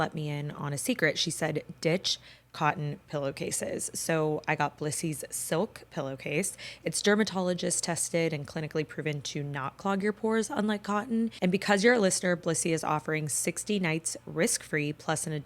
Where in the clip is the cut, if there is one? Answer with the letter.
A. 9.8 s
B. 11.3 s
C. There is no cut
B